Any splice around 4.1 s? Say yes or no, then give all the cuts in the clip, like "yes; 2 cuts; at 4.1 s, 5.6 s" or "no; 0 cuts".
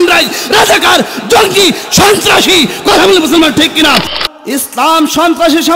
yes; 1 cut; at 4.1 s